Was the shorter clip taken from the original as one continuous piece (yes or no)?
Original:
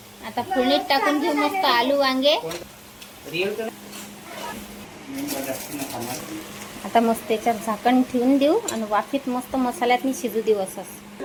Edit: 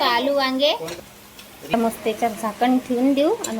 no